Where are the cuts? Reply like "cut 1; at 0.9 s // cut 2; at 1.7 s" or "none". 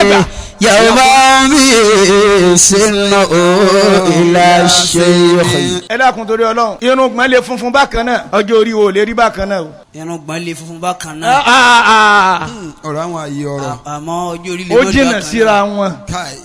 cut 1; at 5.8 s // cut 2; at 6.8 s // cut 3; at 8.2 s // cut 4; at 9.8 s